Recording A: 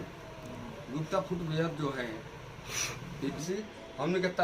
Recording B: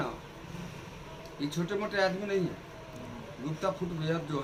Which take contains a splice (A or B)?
A